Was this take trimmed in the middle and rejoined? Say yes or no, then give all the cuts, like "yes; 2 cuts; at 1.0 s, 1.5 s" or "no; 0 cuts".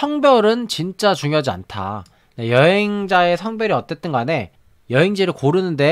no; 0 cuts